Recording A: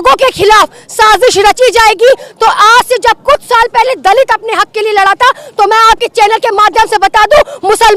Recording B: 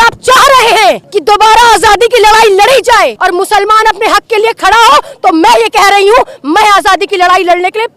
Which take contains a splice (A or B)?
B